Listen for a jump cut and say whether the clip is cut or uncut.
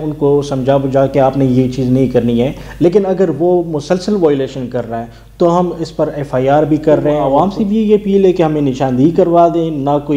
cut